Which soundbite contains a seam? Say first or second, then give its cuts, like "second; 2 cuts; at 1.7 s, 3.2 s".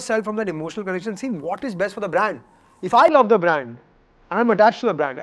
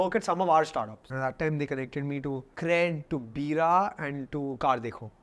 second; 2 cuts; at 1.0 s, 2.5 s